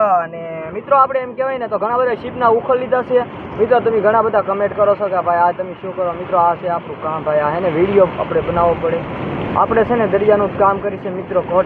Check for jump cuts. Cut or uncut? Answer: uncut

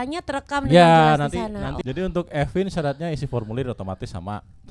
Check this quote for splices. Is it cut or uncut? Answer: cut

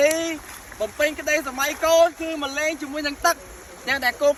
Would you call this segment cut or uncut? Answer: uncut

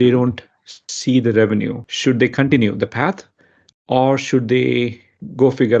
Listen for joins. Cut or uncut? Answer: cut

